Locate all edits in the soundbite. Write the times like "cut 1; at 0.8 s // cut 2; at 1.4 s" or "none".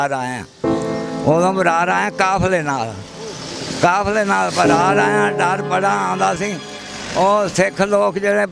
none